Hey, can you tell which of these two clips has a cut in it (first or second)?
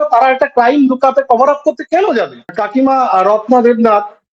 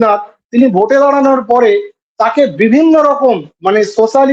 first